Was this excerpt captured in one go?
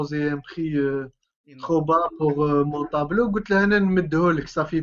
yes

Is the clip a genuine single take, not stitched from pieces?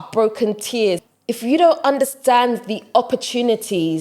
no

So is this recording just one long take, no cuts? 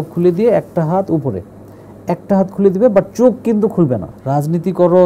no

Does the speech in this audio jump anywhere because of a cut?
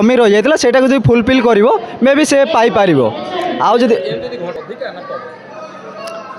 yes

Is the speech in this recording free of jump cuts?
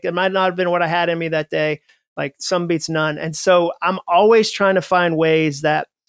yes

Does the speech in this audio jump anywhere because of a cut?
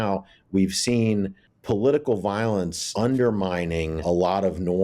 yes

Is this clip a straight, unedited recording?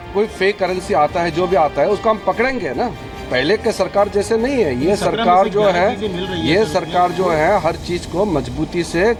yes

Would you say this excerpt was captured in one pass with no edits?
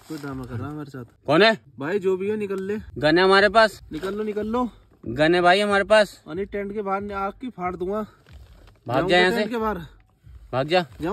no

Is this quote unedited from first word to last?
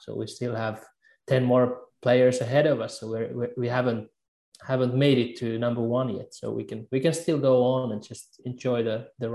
yes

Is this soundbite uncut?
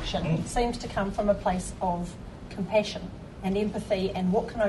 yes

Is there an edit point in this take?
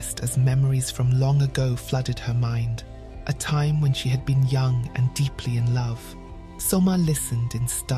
yes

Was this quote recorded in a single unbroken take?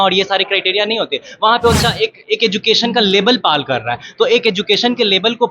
no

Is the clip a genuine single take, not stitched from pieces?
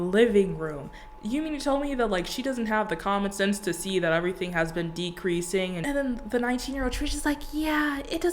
no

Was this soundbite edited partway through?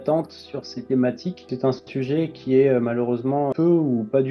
yes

